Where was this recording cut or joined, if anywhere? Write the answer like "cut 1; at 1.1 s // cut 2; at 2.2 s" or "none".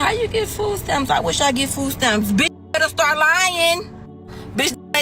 none